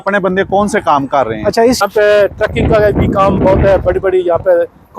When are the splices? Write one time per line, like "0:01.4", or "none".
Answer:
0:01.8